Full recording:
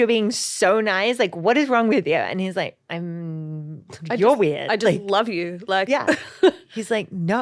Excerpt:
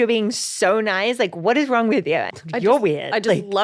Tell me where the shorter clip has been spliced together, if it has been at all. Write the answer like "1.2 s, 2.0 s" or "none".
2.3 s

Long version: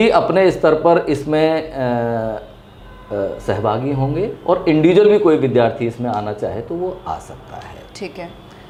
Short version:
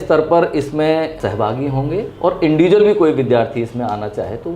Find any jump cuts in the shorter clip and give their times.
1.1 s

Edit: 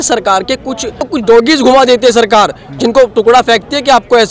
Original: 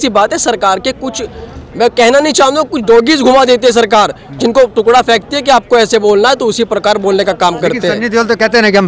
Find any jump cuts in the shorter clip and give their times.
1.1 s

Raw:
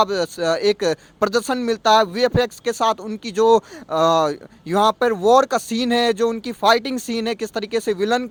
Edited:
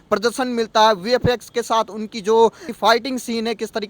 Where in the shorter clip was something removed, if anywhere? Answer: 2.7 s

